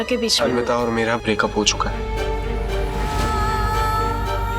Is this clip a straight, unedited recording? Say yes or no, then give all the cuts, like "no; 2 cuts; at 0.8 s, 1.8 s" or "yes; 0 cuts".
no; 1 cut; at 1.9 s